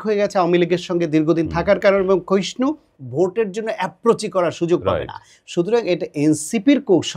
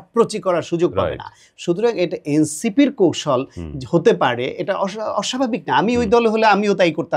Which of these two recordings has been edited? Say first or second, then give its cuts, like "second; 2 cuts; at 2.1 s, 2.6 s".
first; 1 cut; at 3.0 s